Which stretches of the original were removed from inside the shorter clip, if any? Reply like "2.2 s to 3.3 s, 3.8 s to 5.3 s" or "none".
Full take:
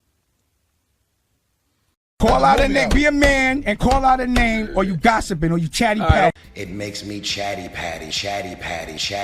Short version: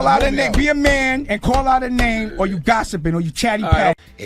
none